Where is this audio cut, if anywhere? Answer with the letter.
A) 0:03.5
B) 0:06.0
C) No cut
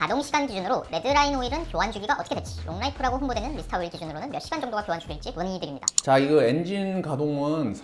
C